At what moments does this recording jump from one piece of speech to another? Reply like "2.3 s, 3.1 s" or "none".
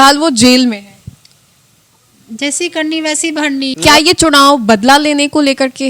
3.7 s